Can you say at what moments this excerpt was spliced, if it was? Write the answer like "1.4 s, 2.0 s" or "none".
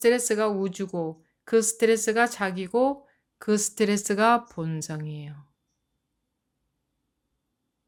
none

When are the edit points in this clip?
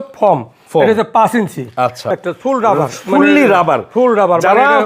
2.2 s

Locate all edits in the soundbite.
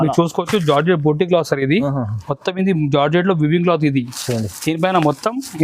none

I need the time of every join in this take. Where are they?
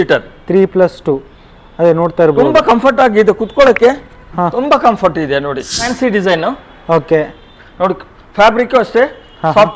5.9 s

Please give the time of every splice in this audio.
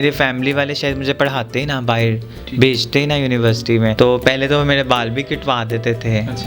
3.9 s

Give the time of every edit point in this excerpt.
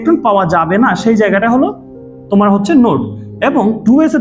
none

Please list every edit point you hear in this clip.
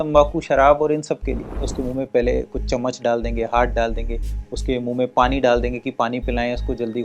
1.7 s

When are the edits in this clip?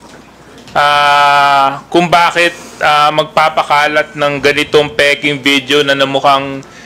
none

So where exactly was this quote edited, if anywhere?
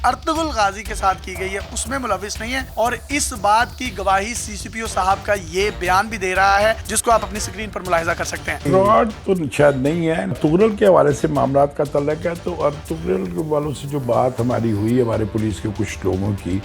2.7 s, 10.3 s

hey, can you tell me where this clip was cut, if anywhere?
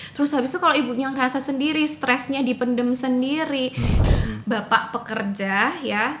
4.0 s

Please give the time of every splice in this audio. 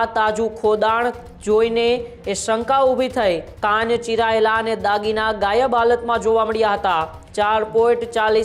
3.5 s, 7.2 s

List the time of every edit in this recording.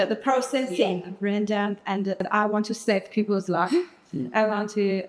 2.3 s

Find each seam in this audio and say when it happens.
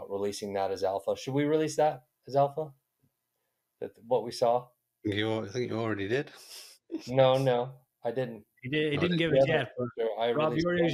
none

